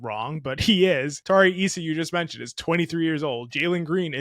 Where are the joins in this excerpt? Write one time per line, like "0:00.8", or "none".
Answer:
0:01.1